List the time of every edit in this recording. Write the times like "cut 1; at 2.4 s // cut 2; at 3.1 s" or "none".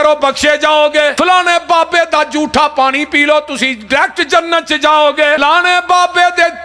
cut 1; at 1.1 s // cut 2; at 5.4 s